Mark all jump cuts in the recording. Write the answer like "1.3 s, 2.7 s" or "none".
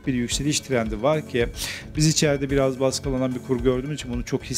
none